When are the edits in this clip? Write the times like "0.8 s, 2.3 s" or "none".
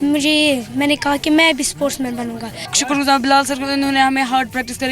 2.6 s